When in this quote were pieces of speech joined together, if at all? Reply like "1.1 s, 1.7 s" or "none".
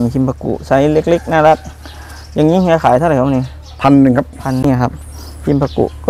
4.6 s